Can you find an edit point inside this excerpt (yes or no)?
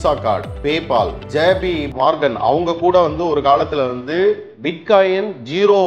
yes